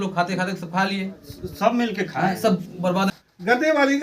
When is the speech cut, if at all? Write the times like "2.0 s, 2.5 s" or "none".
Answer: 3.1 s